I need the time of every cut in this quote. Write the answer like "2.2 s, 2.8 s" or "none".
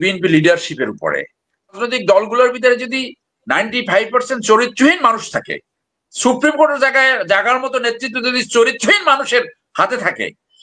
1.8 s